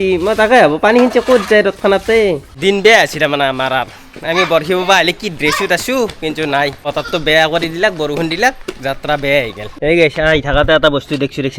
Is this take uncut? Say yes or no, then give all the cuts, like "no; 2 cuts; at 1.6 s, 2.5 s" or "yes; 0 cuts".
no; 3 cuts; at 2.5 s, 6.9 s, 9.7 s